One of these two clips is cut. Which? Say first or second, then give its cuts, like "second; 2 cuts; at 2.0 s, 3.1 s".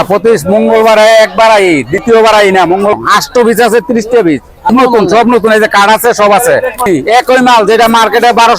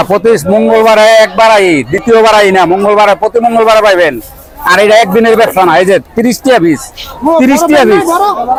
first; 3 cuts; at 2.9 s, 4.7 s, 6.9 s